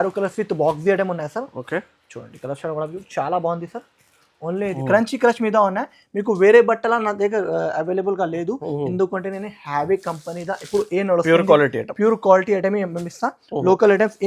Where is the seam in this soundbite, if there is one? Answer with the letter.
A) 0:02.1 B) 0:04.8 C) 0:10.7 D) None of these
B